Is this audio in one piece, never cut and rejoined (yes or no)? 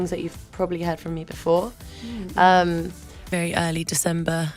no